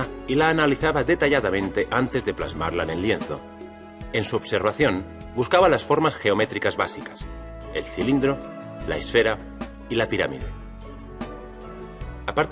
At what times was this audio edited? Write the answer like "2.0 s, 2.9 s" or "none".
none